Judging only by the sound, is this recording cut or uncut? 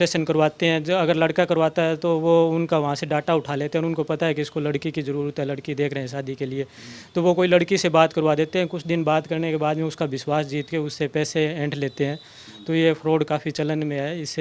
uncut